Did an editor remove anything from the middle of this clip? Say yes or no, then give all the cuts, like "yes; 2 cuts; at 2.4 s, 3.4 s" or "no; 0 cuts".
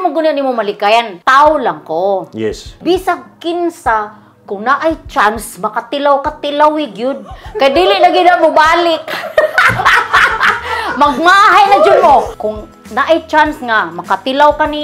yes; 3 cuts; at 1.2 s, 2.7 s, 12.4 s